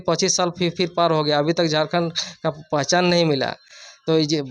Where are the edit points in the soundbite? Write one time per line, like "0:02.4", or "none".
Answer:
none